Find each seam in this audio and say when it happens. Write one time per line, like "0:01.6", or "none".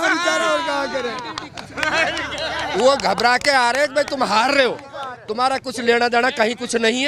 none